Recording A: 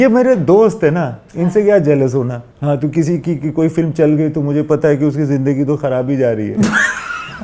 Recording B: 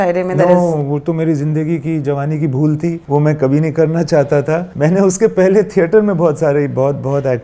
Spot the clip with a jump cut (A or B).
B